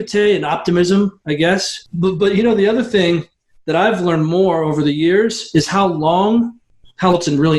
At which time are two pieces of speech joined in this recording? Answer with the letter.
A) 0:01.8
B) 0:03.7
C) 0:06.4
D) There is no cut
D